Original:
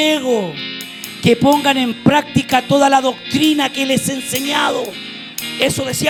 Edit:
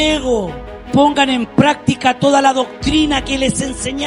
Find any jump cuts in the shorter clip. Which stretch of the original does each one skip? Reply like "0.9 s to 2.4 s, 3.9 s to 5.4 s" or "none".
0.9 s to 1.4 s